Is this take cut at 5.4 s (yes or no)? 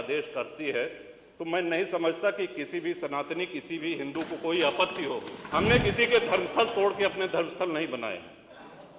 yes